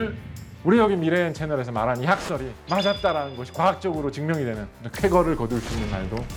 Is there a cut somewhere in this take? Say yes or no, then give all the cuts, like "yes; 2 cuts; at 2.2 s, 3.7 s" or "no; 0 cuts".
no; 0 cuts